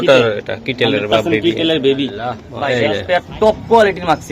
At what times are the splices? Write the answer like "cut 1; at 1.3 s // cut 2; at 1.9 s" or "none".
cut 1; at 2.5 s